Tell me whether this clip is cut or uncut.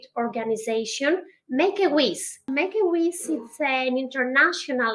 cut